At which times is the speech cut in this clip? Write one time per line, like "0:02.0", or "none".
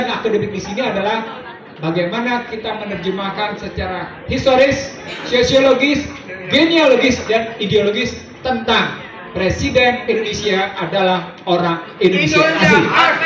none